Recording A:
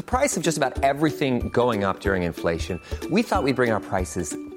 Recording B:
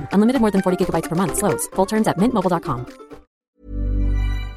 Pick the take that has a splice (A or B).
B